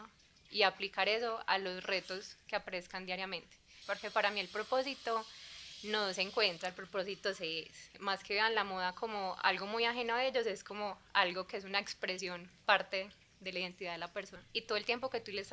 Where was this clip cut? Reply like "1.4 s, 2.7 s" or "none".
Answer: 3.7 s, 8.0 s, 14.4 s